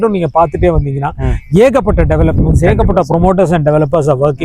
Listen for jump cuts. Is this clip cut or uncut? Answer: uncut